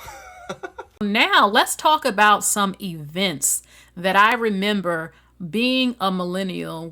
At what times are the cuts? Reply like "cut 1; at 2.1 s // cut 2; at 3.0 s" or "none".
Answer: cut 1; at 1.0 s